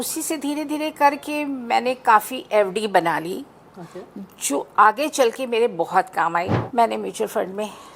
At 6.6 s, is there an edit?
yes; 1 cut; at 6.6 s

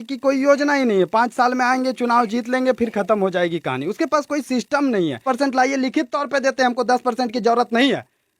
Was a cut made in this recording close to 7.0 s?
no; 1 cut; at 5.2 s

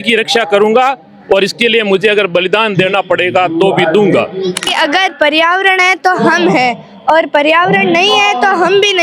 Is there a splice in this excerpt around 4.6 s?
yes; 1 cut; at 4.6 s

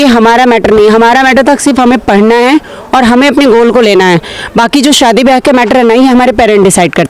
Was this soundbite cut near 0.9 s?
no; 0 cuts

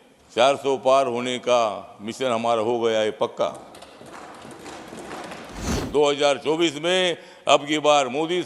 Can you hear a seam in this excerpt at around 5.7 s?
yes; 1 cut; at 5.7 s

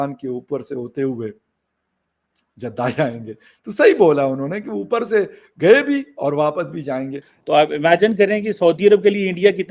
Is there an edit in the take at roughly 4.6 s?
no; 1 cut; at 7.3 s

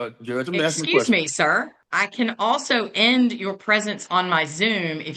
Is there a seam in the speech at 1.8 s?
yes; 1 cut; at 1.8 s

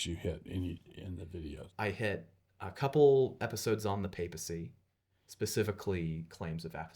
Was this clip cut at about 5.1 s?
no; 1 cut; at 1.6 s

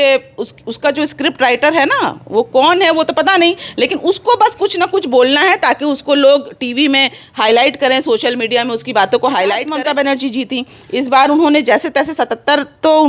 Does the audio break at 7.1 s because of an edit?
no; 1 cut; at 9.7 s

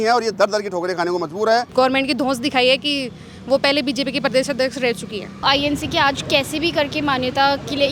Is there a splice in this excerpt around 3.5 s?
no; 2 cuts; at 1.7 s, 5.4 s

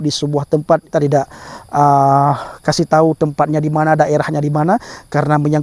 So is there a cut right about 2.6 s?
no; 1 cut; at 0.9 s

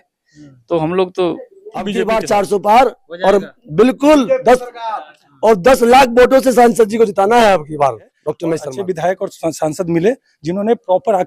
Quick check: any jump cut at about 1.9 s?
yes; 2 cuts; at 1.9 s, 8.7 s

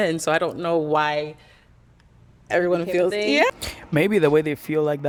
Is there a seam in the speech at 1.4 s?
no; 0 cuts

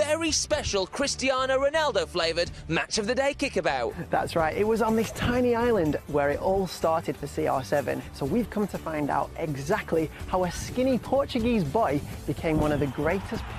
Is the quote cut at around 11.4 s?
yes; 1 cut; at 11.4 s

